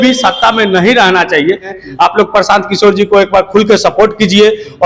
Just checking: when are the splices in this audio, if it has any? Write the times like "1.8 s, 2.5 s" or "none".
1.7 s